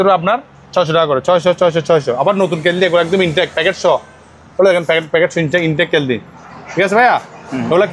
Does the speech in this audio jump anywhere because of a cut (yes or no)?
no